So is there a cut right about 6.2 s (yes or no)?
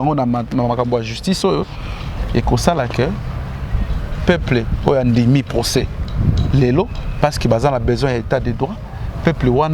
no